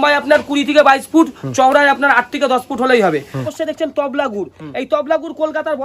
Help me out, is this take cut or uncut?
cut